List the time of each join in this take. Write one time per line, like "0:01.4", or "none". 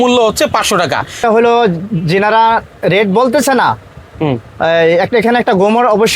0:01.2